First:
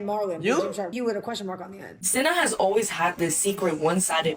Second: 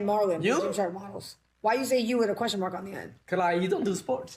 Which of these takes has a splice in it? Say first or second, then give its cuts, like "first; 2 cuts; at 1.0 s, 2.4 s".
first; 2 cuts; at 0.9 s, 2.0 s